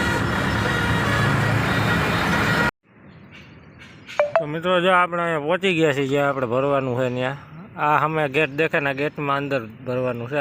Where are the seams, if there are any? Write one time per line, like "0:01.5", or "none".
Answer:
0:02.9